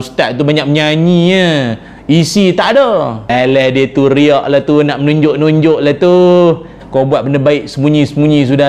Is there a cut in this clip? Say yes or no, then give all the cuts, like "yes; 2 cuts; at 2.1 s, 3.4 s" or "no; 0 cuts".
yes; 2 cuts; at 3.3 s, 6.8 s